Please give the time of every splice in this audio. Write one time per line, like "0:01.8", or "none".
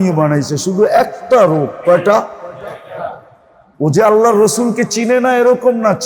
none